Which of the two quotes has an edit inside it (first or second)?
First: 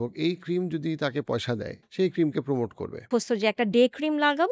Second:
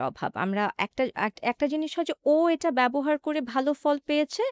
first